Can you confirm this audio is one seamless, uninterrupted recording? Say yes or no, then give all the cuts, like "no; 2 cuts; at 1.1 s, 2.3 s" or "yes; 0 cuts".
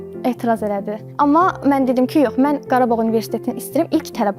no; 1 cut; at 1.0 s